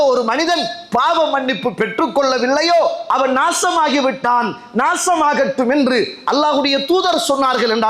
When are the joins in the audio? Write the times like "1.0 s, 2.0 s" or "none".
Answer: none